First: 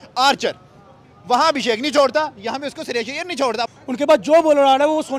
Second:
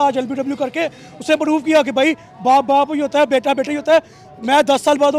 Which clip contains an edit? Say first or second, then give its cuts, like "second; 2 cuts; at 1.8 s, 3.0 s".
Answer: first; 1 cut; at 3.8 s